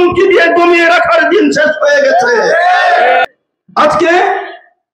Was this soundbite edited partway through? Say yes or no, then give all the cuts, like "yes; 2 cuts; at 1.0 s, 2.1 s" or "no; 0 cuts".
yes; 1 cut; at 3.3 s